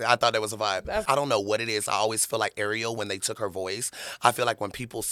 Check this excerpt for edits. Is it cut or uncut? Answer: cut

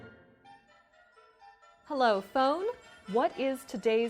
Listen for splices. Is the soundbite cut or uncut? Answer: cut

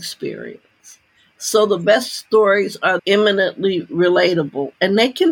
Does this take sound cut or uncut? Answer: cut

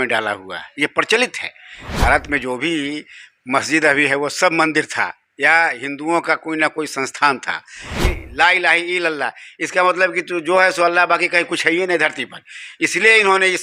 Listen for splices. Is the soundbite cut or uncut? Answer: cut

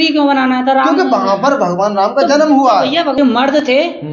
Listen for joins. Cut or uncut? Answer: cut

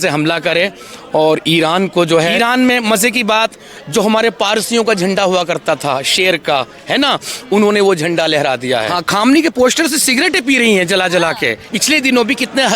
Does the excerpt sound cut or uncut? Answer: cut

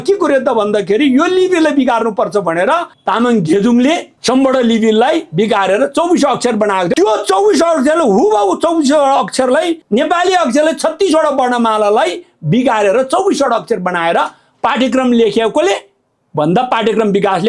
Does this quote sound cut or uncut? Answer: uncut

